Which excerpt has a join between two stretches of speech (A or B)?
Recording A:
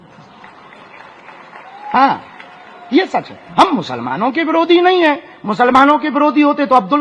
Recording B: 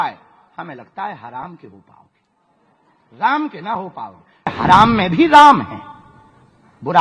B